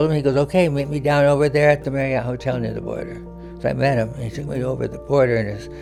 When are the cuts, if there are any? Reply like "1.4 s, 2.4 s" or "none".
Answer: none